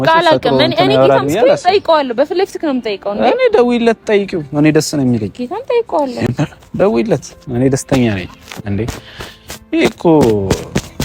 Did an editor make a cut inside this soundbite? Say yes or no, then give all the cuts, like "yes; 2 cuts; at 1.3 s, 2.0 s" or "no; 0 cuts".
no; 0 cuts